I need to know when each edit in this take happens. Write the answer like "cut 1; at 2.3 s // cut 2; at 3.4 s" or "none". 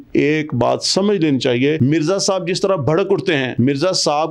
cut 1; at 1.8 s // cut 2; at 3.5 s